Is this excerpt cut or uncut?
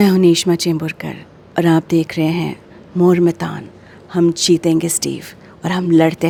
uncut